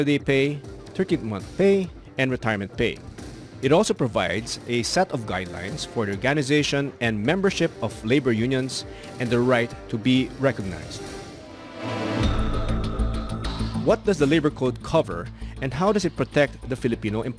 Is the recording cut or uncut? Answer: uncut